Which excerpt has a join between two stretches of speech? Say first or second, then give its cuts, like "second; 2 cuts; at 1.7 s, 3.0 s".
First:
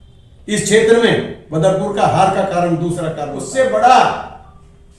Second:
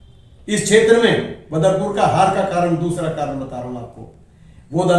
first; 1 cut; at 3.4 s